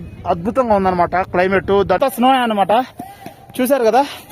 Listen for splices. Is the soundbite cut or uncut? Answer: cut